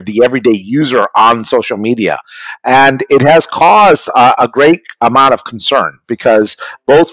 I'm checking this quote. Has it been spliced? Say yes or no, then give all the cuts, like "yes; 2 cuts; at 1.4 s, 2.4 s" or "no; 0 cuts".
no; 0 cuts